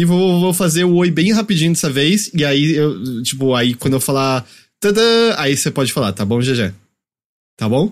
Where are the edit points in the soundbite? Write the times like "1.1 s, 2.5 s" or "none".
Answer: 6.9 s